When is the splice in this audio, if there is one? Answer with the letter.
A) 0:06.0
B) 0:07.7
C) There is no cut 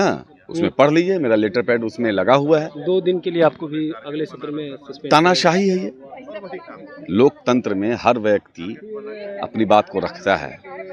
C